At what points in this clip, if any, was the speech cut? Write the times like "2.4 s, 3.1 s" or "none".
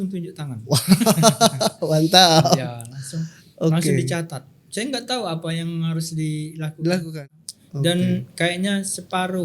7.1 s

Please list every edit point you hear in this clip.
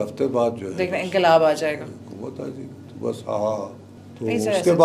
none

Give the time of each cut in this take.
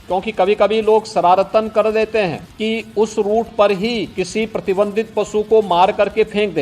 2.5 s, 4.1 s

